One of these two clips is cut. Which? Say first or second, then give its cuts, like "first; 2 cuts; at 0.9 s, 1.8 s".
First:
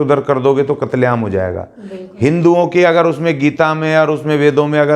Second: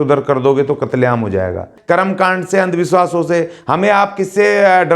second; 1 cut; at 1.7 s